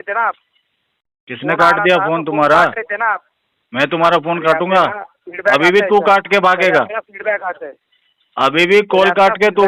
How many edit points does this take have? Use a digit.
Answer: 0